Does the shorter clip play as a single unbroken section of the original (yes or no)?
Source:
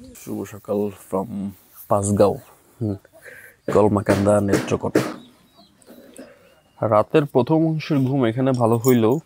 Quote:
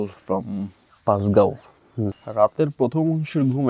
no